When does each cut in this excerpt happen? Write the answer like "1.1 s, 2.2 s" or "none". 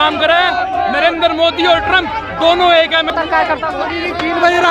3.1 s